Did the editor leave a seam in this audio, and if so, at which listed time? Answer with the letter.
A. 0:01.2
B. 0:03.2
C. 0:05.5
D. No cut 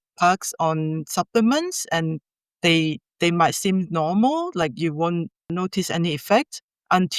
C